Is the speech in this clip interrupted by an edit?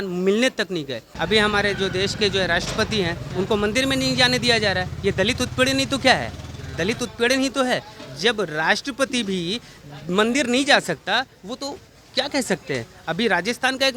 yes; 1 cut; at 1.1 s

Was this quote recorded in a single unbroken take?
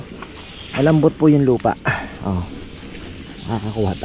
yes; 0 cuts

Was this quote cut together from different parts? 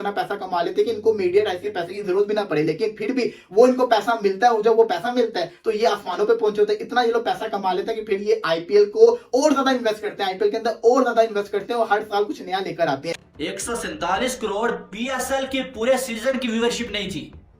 yes; 1 cut; at 13.3 s

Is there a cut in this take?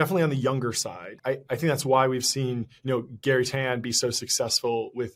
yes; 1 cut; at 1.1 s

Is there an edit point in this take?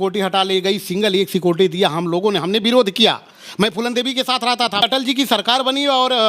yes; 1 cut; at 4.8 s

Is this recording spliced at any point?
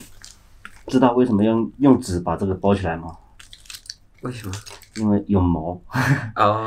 no; 0 cuts

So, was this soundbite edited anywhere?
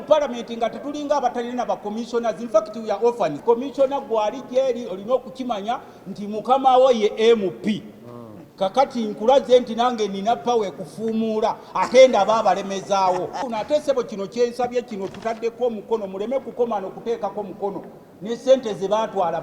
yes; 2 cuts; at 3.4 s, 13.4 s

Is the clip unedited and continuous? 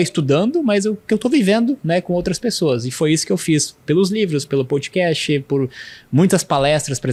yes; 0 cuts

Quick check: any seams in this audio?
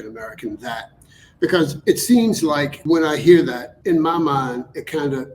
yes; 2 cuts; at 2.7 s, 3.7 s

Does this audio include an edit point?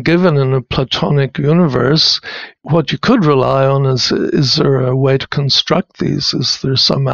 no; 0 cuts

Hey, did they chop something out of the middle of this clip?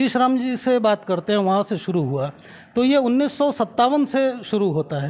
no; 0 cuts

